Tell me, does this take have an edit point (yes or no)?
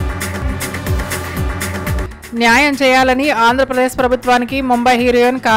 no